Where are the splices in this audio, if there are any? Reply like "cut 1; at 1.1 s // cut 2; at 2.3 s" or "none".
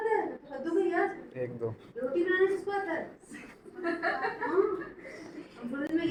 none